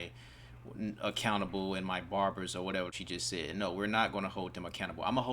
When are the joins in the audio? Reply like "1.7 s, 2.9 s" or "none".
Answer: 3.0 s